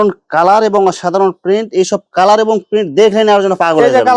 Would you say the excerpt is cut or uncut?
uncut